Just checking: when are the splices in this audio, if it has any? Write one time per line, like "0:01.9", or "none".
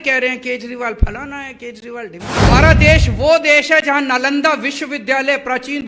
0:02.4